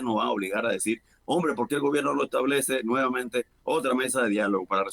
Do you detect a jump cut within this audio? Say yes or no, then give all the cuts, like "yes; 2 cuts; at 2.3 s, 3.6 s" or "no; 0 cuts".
no; 0 cuts